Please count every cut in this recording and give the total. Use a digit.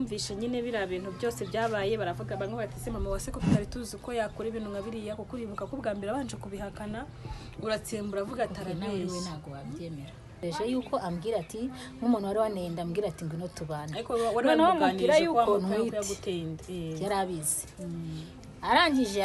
1